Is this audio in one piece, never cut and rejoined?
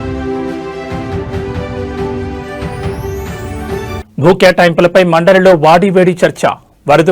no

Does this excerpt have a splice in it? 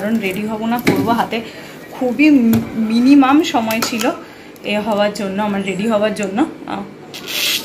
no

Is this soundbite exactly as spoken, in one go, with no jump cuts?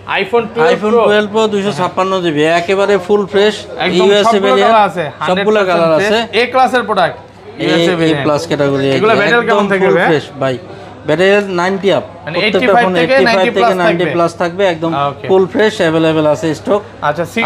yes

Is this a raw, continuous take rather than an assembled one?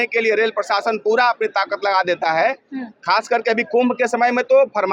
yes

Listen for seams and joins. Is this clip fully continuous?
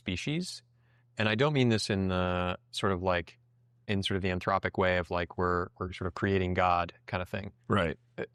yes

